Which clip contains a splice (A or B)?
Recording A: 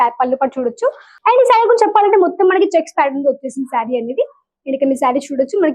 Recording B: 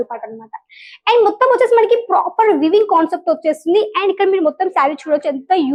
A